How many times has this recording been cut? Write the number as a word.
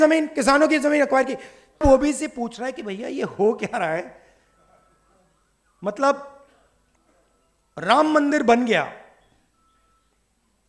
one